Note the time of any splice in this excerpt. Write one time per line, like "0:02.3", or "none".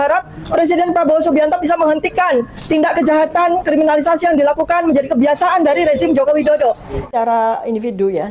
0:07.0